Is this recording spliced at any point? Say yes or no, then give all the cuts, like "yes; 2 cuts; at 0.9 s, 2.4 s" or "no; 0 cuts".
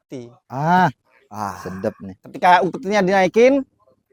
no; 0 cuts